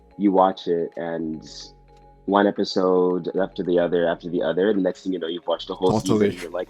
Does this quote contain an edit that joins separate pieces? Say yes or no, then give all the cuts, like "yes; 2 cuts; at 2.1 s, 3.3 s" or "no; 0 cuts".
no; 0 cuts